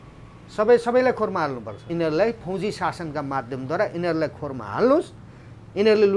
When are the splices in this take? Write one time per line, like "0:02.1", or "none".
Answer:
0:01.9